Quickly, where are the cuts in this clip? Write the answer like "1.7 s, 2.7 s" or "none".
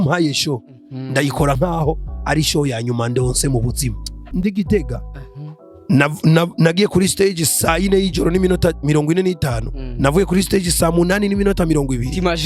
4.3 s